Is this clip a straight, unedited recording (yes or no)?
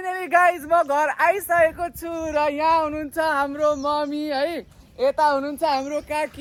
yes